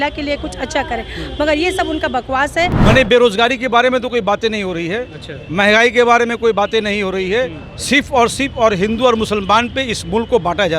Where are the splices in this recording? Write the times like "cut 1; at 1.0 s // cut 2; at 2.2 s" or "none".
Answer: cut 1; at 2.8 s